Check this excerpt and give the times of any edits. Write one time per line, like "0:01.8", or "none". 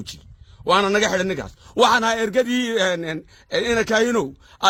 none